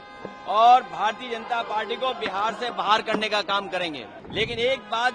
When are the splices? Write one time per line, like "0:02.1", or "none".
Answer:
0:04.2